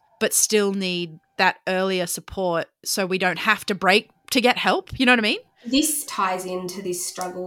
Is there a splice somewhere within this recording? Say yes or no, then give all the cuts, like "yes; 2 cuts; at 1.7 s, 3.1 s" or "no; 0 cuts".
yes; 1 cut; at 6.0 s